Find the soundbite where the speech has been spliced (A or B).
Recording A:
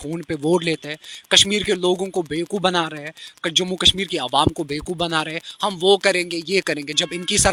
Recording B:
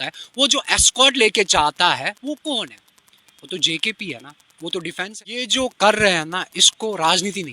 B